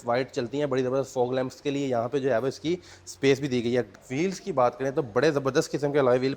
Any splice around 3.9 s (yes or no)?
yes